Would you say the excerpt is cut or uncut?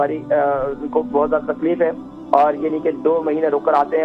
uncut